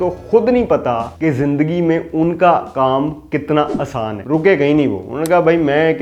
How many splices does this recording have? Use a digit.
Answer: 1